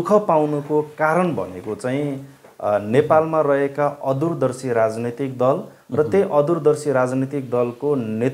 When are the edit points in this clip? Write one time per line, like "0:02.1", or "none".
none